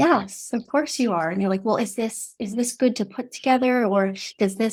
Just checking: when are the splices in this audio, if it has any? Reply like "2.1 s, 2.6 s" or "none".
none